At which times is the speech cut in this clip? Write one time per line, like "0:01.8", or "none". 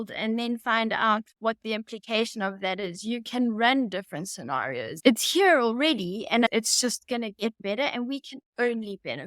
0:05.0
0:06.5